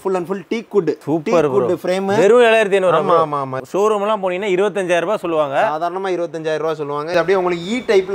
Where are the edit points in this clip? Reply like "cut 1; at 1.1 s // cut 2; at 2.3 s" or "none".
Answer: cut 1; at 3.6 s // cut 2; at 7.1 s